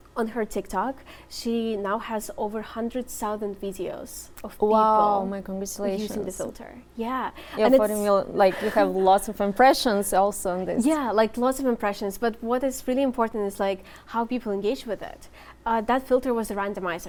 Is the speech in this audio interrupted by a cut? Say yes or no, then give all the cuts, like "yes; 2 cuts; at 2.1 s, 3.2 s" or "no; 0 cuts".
no; 0 cuts